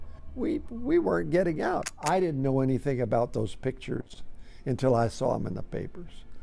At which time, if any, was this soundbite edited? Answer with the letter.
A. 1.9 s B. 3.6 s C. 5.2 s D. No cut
A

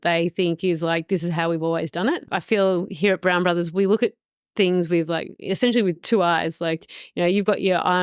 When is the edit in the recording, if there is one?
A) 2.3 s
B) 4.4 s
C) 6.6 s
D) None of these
A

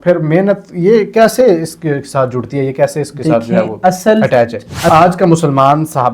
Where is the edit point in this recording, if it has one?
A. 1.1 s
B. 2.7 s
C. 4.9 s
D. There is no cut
C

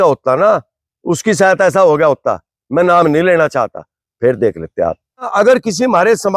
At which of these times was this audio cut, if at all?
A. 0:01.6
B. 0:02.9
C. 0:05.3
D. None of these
C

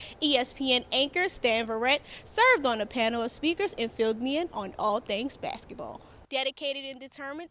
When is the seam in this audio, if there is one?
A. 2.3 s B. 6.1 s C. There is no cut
B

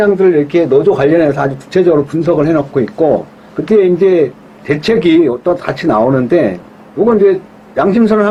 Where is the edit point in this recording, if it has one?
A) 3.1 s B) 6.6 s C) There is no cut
C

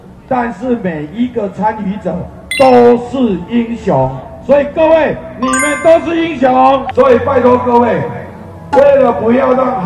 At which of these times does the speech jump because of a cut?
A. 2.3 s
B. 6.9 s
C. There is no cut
B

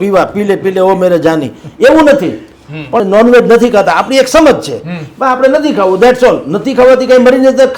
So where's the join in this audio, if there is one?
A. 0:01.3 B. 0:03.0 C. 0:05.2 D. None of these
B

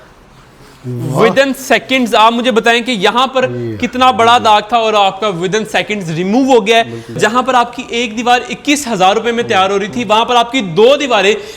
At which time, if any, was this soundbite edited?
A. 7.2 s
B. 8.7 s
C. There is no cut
A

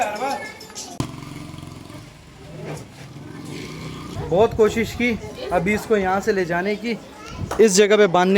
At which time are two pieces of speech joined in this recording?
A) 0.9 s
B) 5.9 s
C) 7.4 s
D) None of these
A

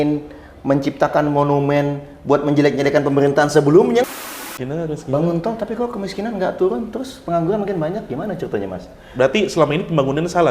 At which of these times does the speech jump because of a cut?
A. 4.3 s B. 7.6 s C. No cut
A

